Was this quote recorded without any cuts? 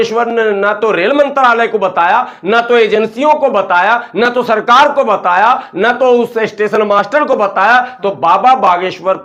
yes; 0 cuts

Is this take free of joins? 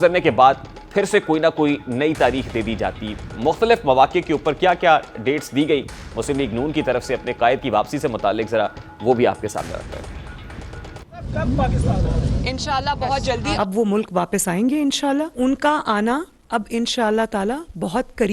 yes; 0 cuts

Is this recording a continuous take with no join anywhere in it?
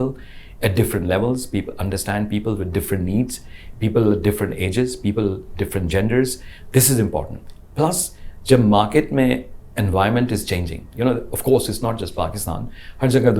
yes; 0 cuts

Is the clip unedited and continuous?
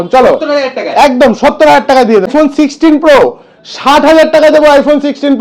no; 1 cut; at 2.3 s

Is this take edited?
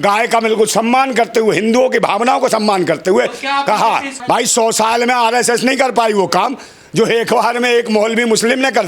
yes; 1 cut; at 4.1 s

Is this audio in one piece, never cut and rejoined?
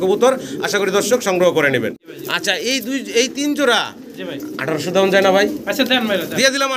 no; 1 cut; at 2.0 s

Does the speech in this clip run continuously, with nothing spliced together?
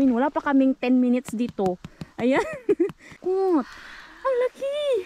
no; 1 cut; at 3.2 s

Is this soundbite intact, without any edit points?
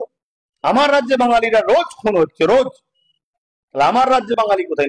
yes; 0 cuts

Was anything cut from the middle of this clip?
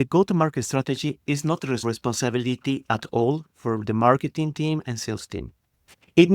yes; 1 cut; at 1.8 s

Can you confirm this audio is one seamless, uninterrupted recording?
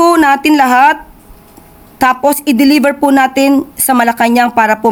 yes; 0 cuts

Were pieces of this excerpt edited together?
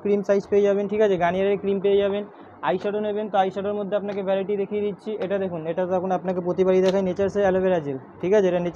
no; 0 cuts

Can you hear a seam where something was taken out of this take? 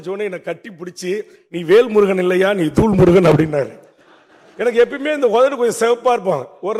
no; 0 cuts

